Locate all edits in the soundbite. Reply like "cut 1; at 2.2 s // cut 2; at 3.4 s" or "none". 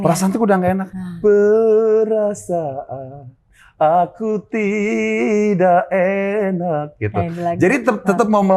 none